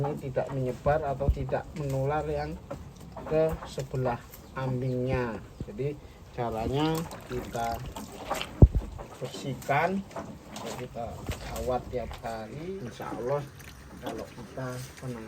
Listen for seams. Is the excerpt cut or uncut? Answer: cut